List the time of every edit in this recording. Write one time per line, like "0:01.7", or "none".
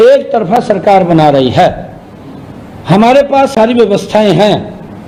none